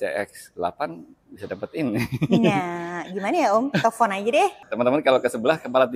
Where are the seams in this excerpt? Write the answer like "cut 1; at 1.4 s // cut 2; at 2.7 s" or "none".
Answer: cut 1; at 4.6 s